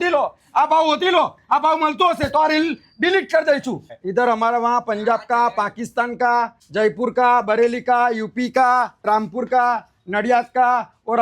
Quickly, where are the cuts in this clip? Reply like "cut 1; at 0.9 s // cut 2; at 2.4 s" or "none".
cut 1; at 3.9 s // cut 2; at 6.6 s // cut 3; at 9.0 s